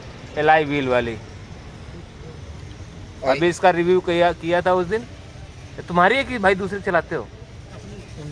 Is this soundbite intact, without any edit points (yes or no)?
yes